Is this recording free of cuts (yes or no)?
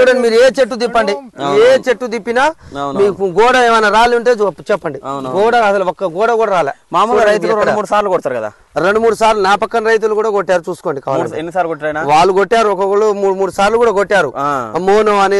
yes